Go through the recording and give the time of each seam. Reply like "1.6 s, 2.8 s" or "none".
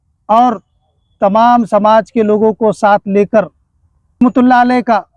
4.2 s